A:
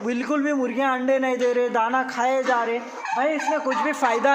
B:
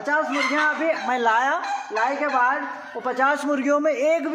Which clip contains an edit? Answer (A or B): A